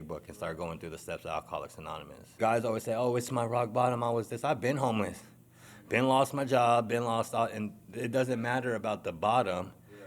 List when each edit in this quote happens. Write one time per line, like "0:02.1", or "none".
0:02.3